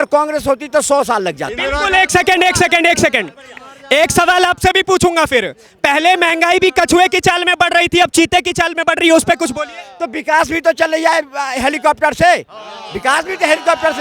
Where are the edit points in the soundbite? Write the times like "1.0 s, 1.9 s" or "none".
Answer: none